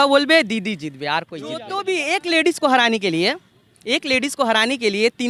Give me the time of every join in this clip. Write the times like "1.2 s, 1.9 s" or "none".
1.7 s